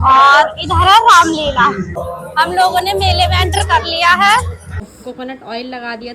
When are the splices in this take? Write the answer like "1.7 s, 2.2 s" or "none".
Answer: 2.1 s, 4.9 s